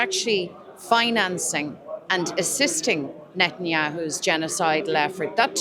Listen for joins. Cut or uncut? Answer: uncut